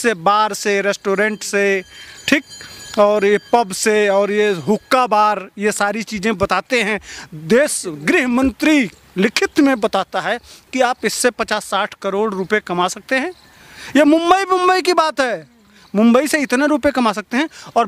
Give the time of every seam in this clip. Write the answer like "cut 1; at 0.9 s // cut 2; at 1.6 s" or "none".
none